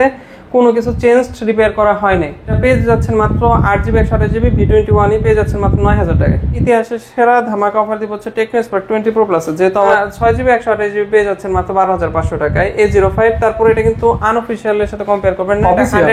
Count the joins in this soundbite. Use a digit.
3